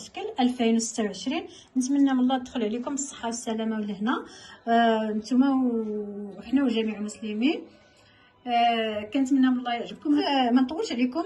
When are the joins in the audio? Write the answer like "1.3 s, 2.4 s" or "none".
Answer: 10.3 s